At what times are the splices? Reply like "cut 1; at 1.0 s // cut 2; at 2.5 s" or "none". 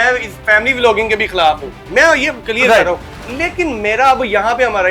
none